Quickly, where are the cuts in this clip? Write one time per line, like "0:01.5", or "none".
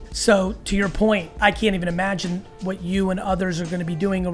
0:01.3